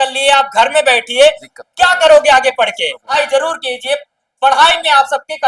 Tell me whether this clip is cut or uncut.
cut